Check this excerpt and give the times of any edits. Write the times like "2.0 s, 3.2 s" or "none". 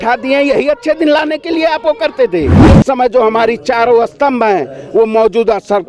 2.7 s